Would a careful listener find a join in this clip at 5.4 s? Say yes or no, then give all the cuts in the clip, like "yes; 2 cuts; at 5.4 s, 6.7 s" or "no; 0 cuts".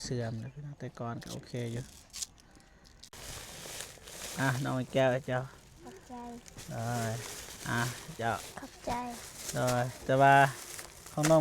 no; 1 cut; at 3.1 s